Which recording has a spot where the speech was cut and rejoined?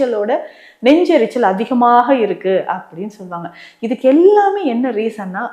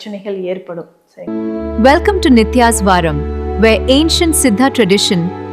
second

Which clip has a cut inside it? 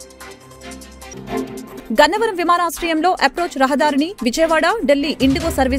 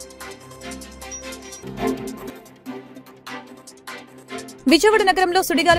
second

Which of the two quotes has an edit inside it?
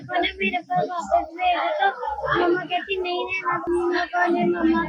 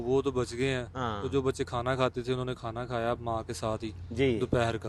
first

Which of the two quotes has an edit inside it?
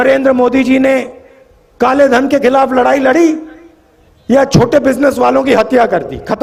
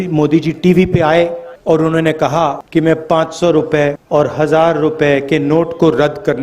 second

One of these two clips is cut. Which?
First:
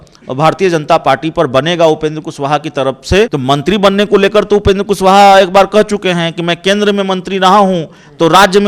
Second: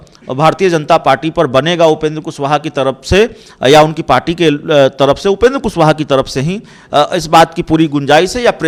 first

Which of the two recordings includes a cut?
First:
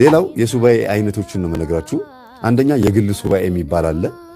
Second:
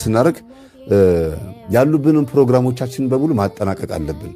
first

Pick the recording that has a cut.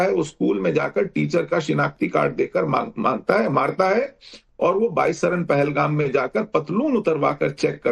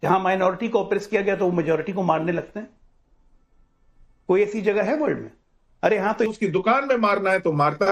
second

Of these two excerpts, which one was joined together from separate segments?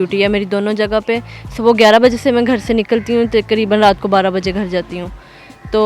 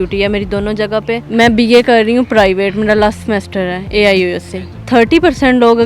second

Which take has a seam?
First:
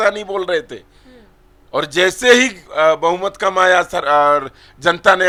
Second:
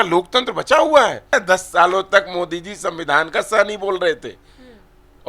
second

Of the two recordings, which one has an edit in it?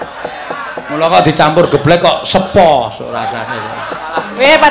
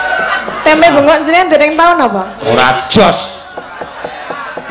second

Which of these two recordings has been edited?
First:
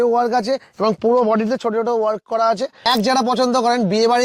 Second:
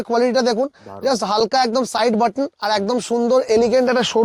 first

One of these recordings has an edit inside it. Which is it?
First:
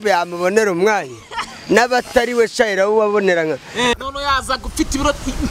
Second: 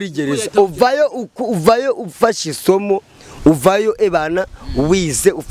first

